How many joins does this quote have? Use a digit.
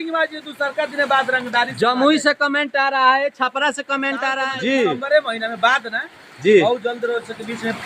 1